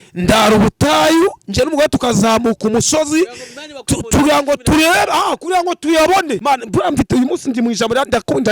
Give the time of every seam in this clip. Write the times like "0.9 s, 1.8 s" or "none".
6.4 s